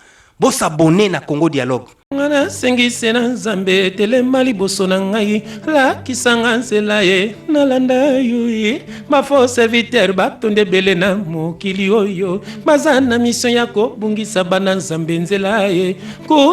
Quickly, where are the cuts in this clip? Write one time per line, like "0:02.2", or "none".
0:02.0